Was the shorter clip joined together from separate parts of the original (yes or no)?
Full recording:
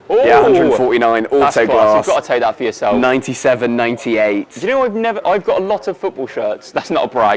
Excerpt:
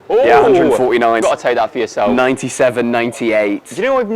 yes